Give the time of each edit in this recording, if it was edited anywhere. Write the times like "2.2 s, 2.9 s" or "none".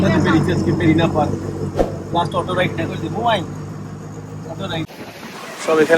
4.9 s